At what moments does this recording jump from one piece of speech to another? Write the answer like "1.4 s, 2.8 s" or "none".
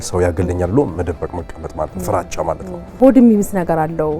3.0 s